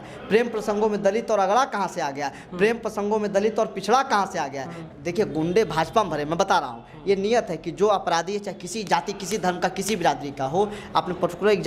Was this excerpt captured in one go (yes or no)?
no